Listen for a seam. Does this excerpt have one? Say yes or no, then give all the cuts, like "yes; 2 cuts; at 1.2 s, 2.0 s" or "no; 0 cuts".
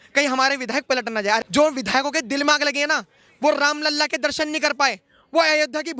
yes; 1 cut; at 1.5 s